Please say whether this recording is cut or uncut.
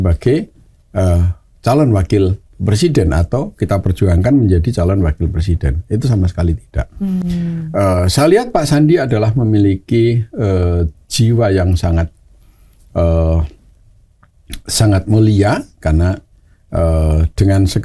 uncut